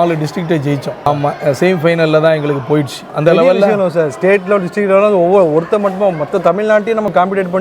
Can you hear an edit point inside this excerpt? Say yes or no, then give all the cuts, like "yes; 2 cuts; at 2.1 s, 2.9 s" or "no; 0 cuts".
no; 0 cuts